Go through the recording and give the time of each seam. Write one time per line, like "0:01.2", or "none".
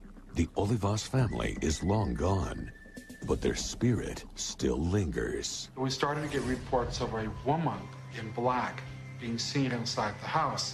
0:04.0